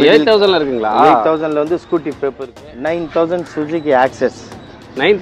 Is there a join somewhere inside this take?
yes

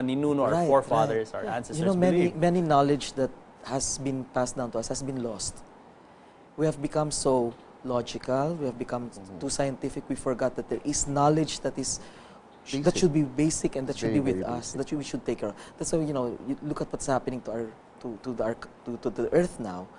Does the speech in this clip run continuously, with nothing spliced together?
yes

